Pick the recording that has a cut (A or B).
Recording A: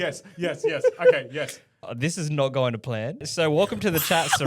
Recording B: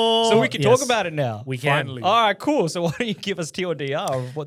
A